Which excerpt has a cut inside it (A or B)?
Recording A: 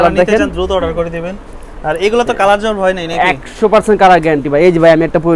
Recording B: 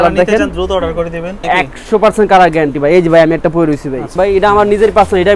B